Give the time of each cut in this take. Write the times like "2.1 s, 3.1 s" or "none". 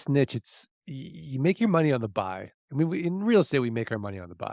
none